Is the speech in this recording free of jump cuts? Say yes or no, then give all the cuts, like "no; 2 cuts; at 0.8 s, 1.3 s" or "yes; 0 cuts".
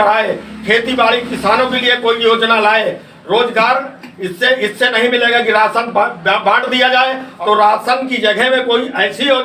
no; 1 cut; at 7.3 s